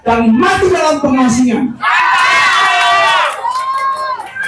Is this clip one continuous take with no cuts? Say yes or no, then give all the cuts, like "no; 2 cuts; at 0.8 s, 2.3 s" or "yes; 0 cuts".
yes; 0 cuts